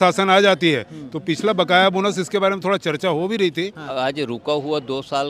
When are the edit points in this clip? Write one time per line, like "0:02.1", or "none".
0:03.9